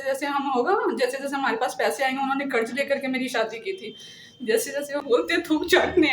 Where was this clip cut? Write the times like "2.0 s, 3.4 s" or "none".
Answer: 5.0 s